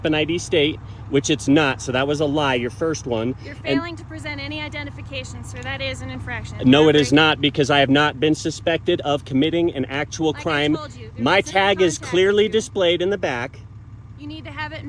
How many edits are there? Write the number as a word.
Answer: zero